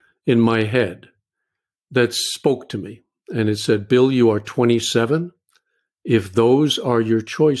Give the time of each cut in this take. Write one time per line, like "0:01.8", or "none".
none